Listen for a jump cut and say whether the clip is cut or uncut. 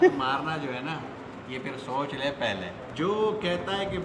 cut